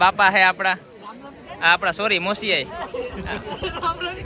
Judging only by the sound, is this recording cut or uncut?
uncut